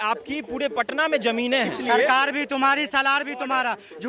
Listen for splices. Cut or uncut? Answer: cut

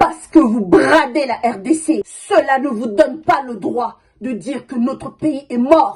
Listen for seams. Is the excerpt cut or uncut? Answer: cut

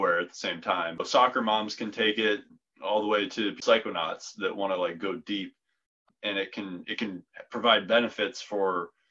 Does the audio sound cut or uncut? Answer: cut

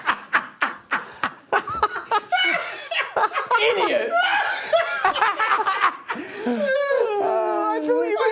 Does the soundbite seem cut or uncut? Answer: uncut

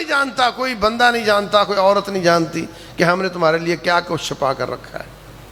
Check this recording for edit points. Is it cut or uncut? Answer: uncut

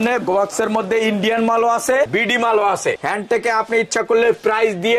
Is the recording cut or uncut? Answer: cut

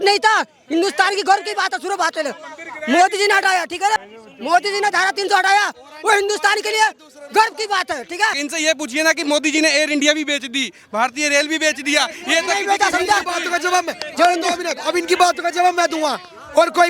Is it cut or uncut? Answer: cut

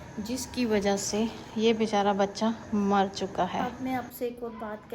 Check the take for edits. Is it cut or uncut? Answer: cut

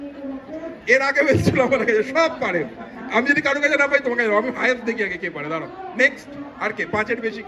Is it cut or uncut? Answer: uncut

